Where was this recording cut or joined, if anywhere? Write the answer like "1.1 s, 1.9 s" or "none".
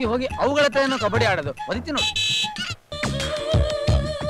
3.0 s